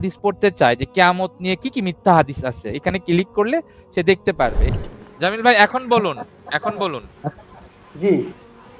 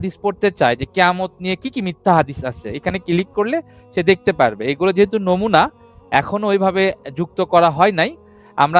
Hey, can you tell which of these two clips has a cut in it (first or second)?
first